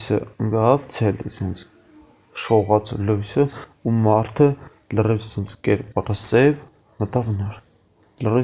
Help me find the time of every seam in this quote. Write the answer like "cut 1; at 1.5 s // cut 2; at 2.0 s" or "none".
none